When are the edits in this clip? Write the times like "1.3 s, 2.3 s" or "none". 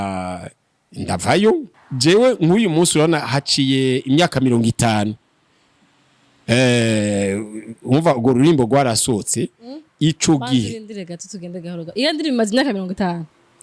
1.8 s